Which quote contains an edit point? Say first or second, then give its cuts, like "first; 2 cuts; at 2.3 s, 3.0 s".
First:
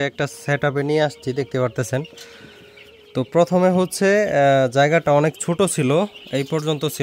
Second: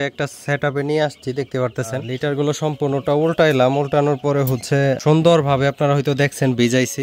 second; 2 cuts; at 2.2 s, 5.0 s